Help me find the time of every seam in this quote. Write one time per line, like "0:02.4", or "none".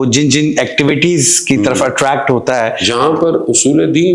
0:02.8